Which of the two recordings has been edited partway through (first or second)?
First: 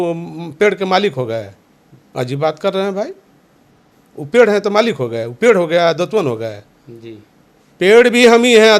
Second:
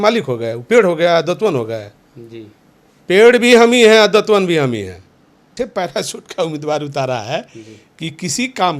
second